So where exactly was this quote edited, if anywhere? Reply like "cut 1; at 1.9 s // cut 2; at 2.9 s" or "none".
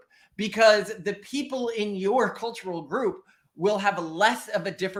none